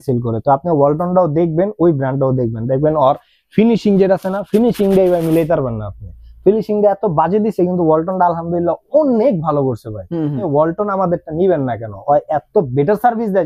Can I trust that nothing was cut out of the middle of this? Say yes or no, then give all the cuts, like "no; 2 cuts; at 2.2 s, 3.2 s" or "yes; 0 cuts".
no; 1 cut; at 10.4 s